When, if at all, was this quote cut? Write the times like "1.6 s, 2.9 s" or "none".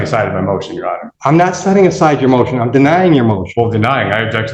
1.1 s